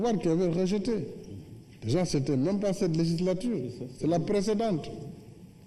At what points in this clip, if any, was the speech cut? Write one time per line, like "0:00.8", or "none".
0:03.1